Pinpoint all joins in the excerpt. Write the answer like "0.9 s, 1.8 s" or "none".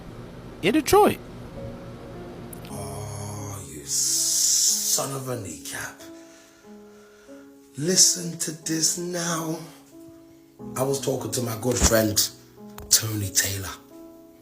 2.6 s